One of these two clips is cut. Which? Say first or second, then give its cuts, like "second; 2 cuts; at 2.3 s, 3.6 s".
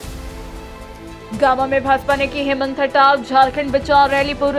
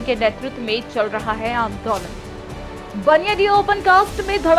first; 1 cut; at 1.3 s